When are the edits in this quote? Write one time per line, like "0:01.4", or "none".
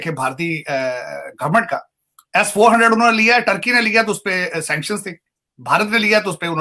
none